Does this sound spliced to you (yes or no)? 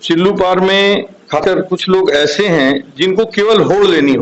yes